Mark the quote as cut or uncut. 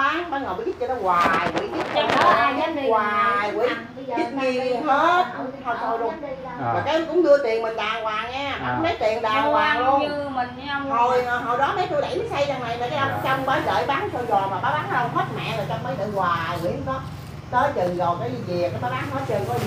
uncut